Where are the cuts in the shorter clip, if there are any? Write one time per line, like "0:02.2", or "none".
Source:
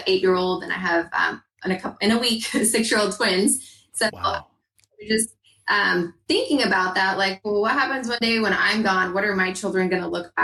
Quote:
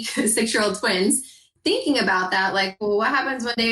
0:01.5